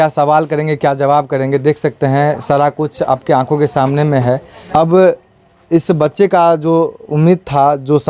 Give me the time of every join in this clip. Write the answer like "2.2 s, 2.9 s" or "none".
4.5 s

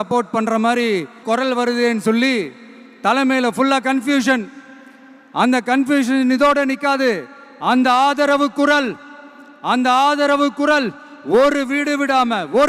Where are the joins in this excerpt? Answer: 1.2 s

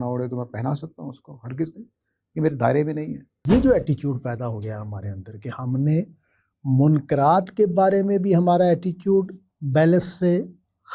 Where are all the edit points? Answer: 3.4 s

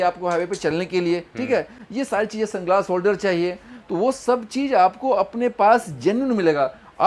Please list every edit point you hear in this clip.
none

